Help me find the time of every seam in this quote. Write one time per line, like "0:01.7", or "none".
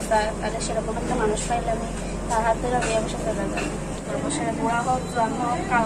0:04.0